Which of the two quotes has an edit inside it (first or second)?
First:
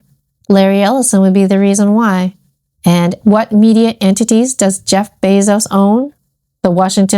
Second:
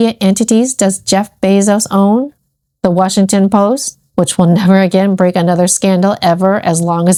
first